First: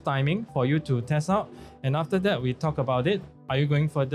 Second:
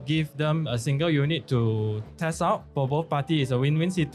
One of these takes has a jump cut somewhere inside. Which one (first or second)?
second